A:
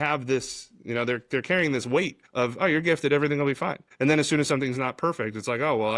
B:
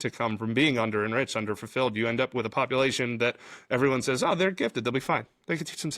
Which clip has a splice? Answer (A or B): A